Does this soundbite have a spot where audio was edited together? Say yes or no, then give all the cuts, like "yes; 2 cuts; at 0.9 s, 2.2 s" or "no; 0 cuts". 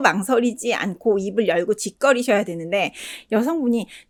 no; 0 cuts